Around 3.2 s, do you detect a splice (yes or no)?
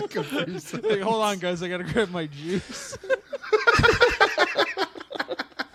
no